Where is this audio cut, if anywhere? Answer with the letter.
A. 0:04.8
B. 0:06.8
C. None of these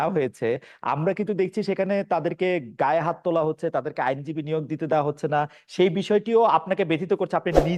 C